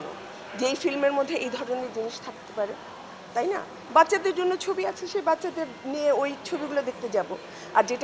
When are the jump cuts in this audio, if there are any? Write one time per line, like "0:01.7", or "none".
none